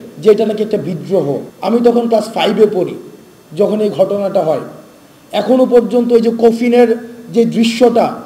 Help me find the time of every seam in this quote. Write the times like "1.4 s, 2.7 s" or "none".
1.5 s